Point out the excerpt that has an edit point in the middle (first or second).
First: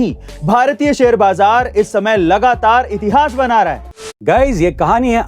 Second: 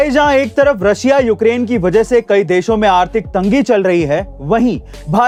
first